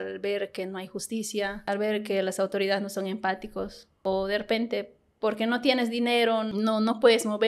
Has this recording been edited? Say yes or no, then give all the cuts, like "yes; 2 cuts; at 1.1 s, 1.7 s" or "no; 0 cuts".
yes; 3 cuts; at 1.7 s, 3.8 s, 6.5 s